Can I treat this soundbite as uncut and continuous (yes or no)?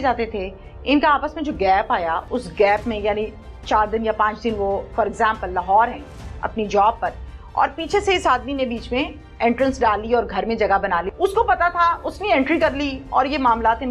no